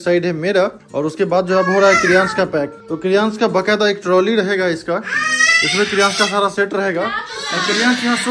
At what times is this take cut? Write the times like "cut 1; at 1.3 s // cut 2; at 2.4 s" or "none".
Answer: none